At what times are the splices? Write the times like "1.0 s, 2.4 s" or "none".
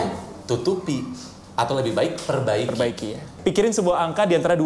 3.3 s